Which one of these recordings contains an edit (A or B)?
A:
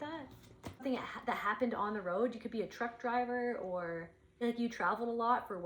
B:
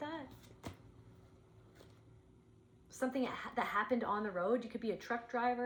A